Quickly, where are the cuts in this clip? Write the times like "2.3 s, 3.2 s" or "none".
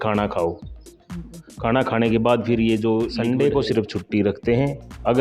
3.1 s